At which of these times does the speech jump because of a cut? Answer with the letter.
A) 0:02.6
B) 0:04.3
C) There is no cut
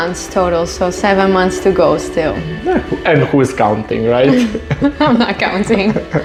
C